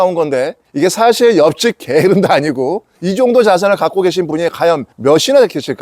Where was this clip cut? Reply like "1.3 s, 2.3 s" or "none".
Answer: 4.9 s